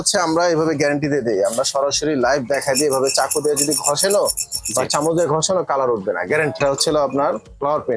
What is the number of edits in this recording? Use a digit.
1